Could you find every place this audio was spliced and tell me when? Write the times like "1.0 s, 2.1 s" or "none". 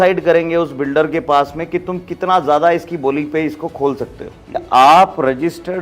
4.6 s